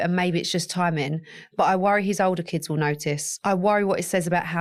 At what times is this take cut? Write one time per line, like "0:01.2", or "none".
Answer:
none

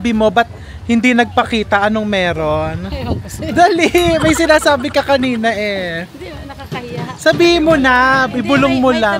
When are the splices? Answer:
none

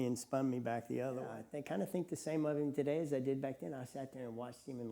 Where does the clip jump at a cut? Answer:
0:01.4

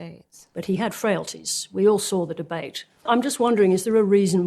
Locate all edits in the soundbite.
0:03.0

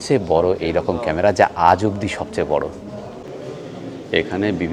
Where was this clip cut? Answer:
0:03.3

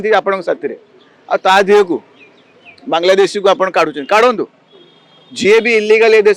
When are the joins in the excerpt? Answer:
none

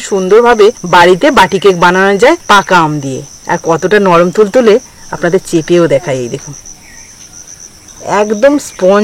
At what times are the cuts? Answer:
0:00.8
0:02.4
0:03.3
0:07.8

